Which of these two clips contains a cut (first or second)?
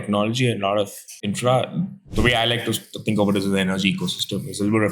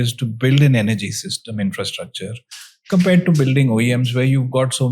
first